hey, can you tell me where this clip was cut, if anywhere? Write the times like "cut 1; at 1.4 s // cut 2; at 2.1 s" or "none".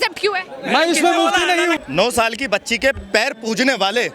cut 1; at 1.8 s